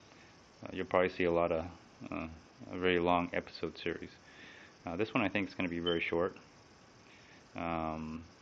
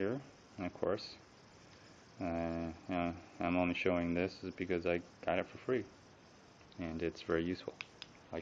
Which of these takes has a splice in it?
first; 1 cut; at 3.5 s

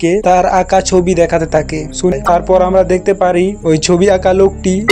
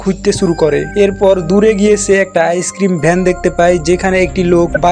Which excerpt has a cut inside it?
first; 1 cut; at 2.1 s

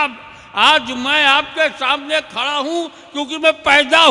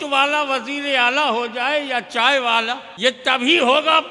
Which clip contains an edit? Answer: second; 1 cut; at 2.9 s

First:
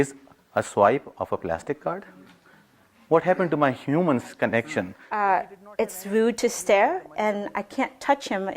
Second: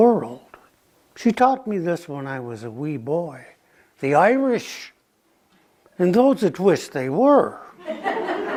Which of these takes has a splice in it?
first; 1 cut; at 5.0 s

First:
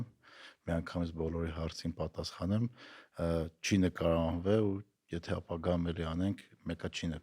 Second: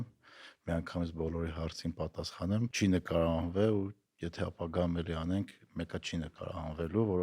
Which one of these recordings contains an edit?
second; 1 cut; at 2.7 s

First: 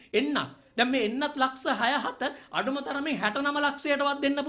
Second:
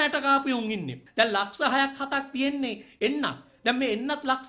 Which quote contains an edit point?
second; 1 cut; at 1.0 s

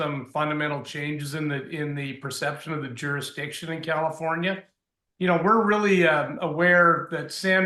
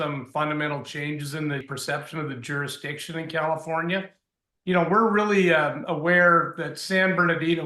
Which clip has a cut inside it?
second; 1 cut; at 1.7 s

